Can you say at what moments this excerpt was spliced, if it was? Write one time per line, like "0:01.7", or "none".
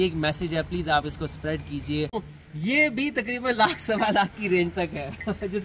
0:02.3